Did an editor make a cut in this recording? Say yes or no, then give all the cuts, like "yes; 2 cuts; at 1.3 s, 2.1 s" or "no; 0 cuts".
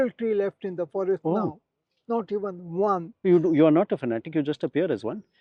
yes; 1 cut; at 3.2 s